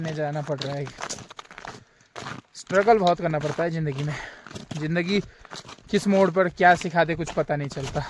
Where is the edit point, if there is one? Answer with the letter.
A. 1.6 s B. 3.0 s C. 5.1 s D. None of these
D